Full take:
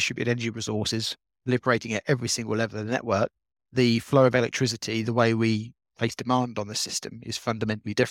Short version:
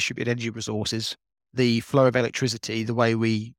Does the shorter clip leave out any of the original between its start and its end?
yes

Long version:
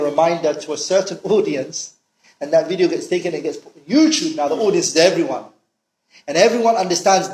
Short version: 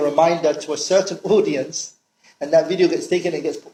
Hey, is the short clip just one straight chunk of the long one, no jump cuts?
yes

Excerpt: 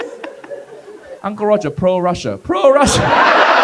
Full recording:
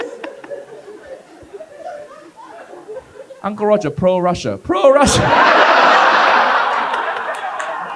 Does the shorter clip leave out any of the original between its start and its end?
yes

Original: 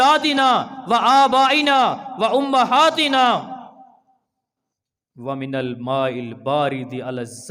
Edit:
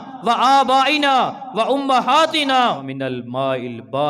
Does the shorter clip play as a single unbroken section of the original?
no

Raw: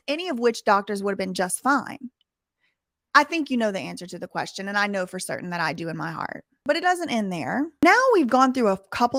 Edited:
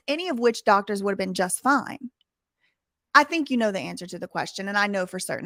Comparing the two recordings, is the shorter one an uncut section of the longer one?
yes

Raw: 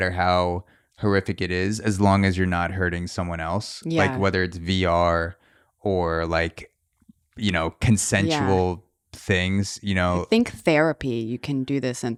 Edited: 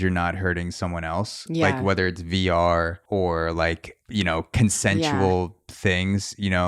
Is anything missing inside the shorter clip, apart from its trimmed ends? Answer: yes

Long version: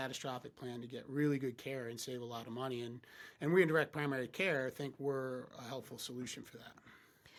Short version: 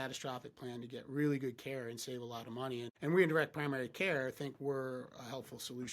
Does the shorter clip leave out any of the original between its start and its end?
yes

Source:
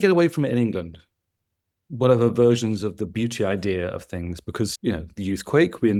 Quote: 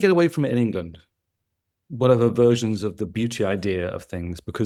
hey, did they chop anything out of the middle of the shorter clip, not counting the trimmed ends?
no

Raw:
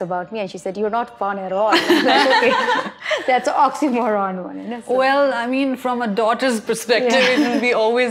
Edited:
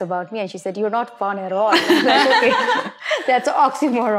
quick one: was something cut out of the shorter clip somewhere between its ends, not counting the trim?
no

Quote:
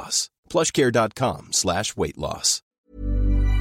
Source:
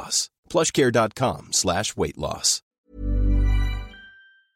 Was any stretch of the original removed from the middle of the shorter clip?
no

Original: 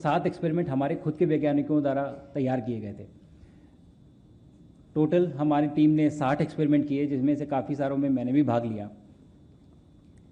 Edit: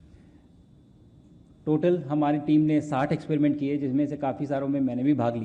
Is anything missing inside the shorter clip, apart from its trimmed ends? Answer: no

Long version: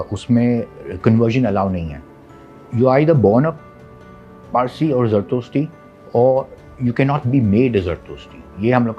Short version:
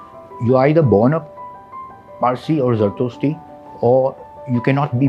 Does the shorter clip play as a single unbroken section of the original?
yes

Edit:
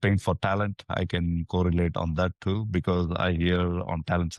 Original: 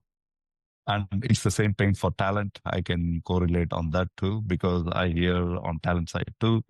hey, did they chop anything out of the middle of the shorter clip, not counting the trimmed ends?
no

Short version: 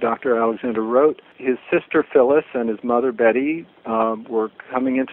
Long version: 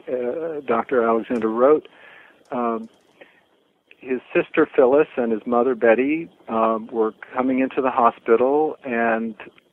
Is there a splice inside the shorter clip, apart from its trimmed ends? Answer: yes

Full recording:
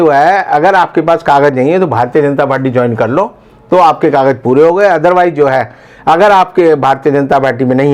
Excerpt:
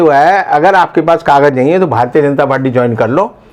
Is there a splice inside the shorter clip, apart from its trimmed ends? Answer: no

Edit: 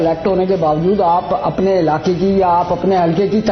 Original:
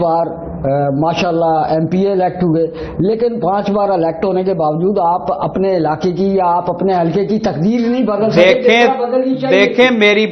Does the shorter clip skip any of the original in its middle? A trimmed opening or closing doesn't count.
no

